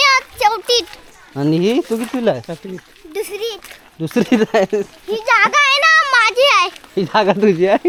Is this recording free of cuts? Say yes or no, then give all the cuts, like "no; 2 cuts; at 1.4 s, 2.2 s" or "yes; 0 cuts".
yes; 0 cuts